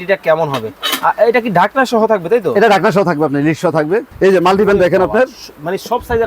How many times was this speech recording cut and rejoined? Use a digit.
1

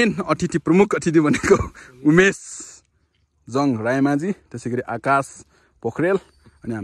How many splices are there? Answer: 0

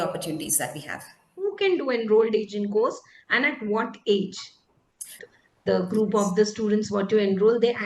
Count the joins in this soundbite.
2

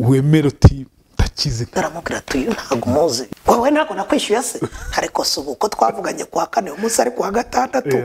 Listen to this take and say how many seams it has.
2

